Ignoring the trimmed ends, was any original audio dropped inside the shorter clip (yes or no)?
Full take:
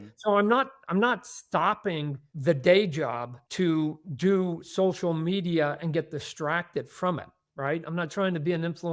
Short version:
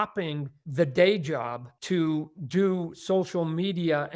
no